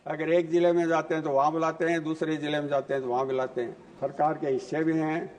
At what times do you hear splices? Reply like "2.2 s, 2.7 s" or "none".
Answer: 3.8 s